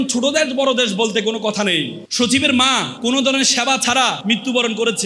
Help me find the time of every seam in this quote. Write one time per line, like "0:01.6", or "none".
0:02.0
0:02.9
0:04.2